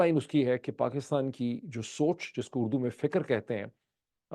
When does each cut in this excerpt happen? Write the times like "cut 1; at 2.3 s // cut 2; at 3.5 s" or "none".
none